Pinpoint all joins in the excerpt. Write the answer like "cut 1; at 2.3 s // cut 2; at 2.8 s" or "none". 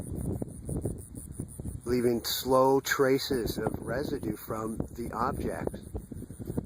cut 1; at 1.4 s